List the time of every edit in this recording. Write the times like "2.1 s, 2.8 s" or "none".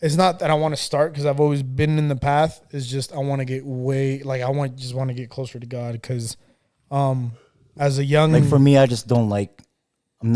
8.3 s